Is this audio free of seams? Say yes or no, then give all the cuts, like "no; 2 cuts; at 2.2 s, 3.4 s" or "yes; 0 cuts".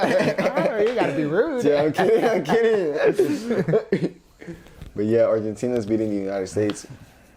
yes; 0 cuts